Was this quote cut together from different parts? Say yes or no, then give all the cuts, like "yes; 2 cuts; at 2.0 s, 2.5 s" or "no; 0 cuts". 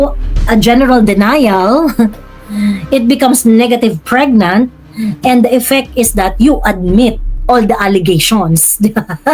no; 0 cuts